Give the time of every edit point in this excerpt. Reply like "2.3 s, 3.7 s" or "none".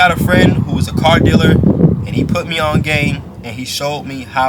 none